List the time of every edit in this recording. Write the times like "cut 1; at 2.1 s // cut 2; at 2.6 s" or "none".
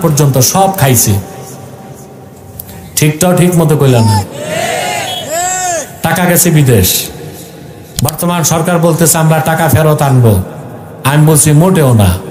none